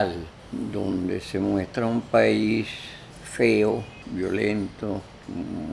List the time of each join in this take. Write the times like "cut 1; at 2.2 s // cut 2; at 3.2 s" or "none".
none